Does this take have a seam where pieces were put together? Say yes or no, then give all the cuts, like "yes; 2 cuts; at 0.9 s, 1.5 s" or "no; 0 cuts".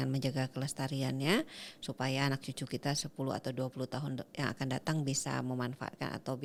no; 0 cuts